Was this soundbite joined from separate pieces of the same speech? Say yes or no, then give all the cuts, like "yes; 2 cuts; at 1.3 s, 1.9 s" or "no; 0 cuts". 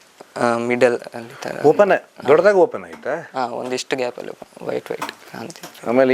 no; 0 cuts